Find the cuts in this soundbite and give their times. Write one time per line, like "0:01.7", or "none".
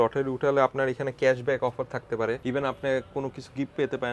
0:02.4